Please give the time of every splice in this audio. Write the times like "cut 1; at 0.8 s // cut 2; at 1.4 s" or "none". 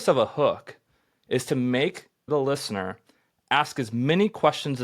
cut 1; at 2.3 s